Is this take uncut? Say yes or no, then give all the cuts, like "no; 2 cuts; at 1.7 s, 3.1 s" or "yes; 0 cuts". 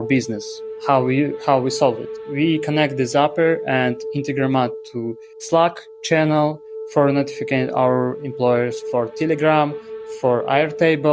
yes; 0 cuts